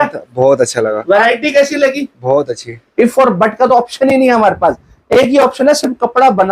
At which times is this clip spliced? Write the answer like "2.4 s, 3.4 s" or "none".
2.8 s